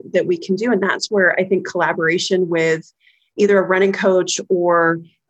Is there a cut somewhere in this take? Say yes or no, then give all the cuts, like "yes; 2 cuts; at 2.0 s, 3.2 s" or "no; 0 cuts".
yes; 1 cut; at 3.3 s